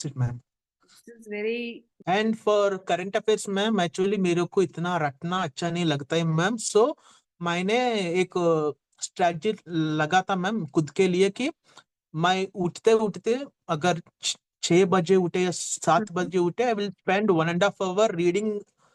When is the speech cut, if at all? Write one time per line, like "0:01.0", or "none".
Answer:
0:01.9